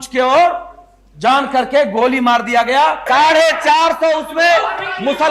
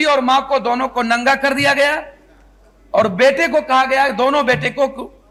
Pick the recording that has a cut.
first; 1 cut; at 3.1 s

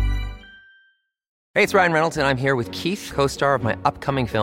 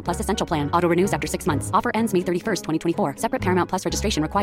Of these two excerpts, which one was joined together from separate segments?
first; 1 cut; at 1.3 s

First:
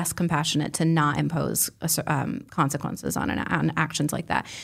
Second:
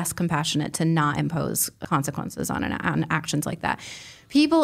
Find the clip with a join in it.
second; 1 cut; at 1.8 s

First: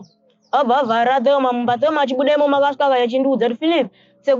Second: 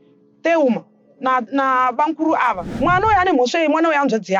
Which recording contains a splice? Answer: second; 1 cut; at 2.6 s

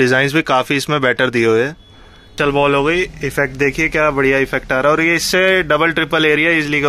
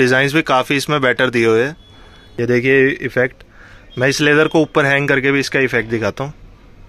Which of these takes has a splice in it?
first; 1 cut; at 2.3 s

